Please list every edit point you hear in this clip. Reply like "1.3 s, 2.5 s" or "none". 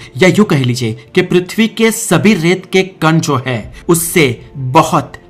none